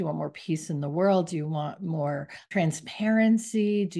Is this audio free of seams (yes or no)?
no